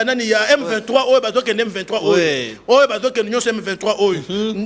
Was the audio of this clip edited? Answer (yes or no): no